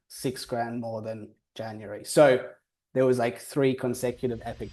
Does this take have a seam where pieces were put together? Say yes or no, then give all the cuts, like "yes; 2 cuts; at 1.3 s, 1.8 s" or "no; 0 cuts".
no; 0 cuts